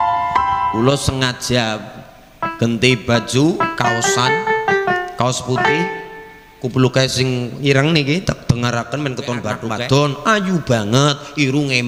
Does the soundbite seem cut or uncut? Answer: cut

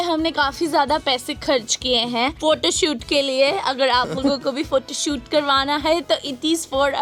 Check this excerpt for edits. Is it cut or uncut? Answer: uncut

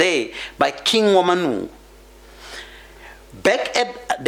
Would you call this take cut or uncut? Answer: uncut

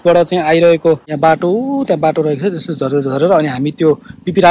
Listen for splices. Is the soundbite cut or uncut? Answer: cut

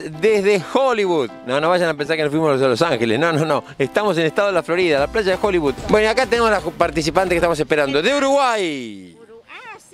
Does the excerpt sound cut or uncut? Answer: uncut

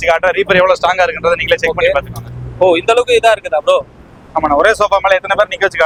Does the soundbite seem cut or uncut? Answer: uncut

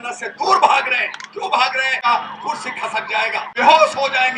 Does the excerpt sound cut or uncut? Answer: cut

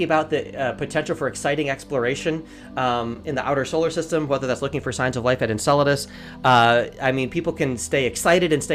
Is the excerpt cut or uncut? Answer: uncut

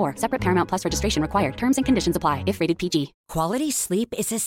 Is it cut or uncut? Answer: cut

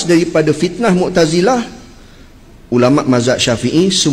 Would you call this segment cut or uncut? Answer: uncut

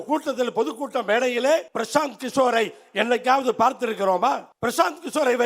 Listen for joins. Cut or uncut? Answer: cut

